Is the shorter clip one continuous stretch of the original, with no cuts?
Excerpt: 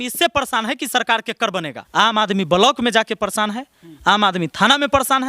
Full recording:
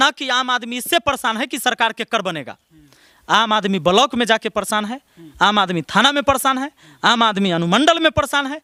no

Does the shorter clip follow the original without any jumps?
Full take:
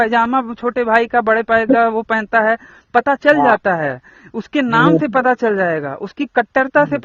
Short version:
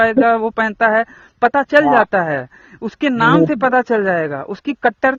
yes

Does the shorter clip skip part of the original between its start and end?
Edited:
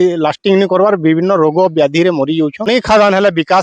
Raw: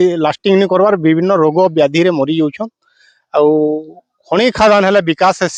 yes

